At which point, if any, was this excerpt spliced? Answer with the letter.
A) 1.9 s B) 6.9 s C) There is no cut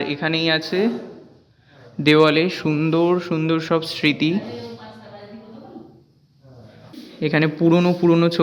B